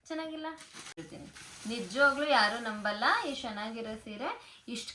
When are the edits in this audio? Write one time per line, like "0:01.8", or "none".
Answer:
0:00.9